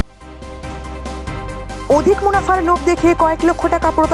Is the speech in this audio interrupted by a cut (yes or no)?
yes